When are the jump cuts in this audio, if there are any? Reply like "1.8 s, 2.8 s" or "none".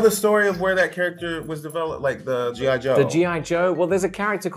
none